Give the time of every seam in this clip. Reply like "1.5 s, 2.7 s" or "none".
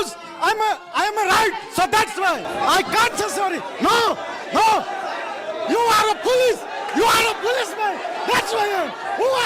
2.5 s